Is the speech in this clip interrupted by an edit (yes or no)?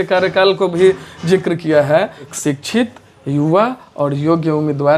yes